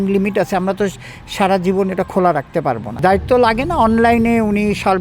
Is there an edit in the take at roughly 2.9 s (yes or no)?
yes